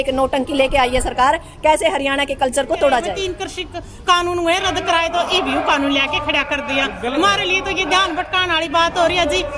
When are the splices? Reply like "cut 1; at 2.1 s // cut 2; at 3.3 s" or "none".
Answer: cut 1; at 3.2 s